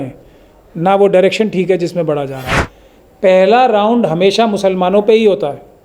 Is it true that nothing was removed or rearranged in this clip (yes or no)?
no